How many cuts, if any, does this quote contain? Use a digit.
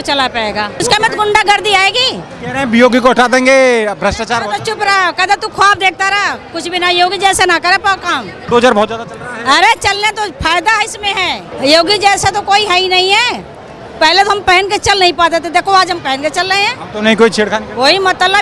3